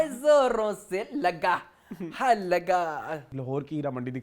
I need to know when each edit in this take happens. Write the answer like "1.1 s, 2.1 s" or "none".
3.3 s

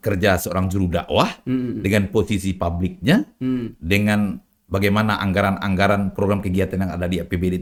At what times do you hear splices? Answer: none

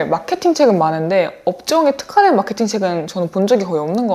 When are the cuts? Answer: none

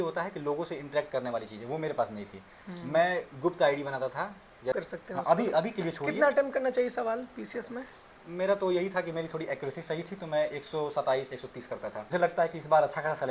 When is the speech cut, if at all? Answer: 4.7 s, 12.0 s

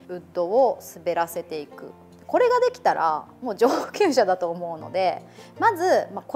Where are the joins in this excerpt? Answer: none

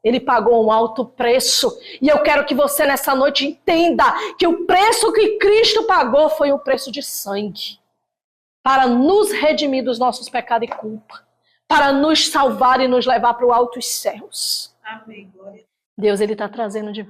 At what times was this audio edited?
15.7 s

